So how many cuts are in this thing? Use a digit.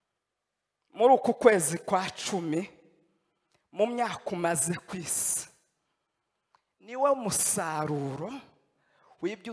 0